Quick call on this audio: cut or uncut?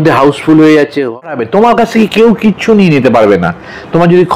cut